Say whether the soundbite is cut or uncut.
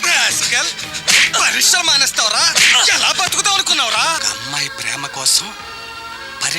cut